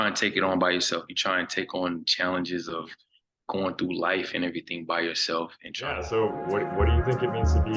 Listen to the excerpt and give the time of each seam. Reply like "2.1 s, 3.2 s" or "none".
6.1 s